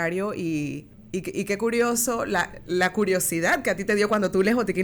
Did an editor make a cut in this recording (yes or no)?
yes